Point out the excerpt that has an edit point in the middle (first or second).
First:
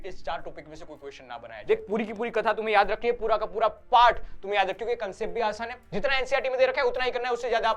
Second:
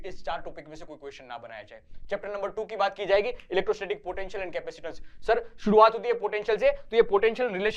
first